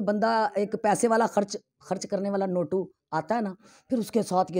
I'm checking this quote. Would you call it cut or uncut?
uncut